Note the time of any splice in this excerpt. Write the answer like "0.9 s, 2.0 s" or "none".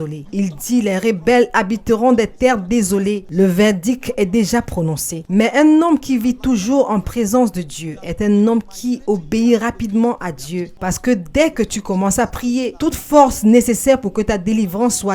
10.7 s